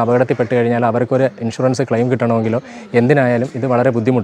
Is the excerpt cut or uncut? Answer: uncut